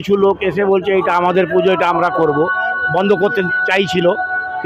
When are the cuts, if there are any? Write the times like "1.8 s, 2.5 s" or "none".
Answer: none